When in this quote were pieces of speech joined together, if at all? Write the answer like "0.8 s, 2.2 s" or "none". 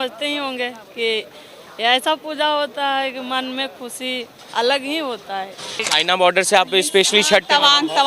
5.8 s